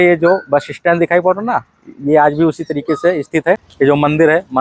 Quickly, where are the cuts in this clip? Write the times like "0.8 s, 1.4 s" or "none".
3.7 s